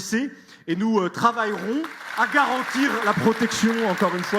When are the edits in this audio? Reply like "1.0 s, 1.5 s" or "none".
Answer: 2.0 s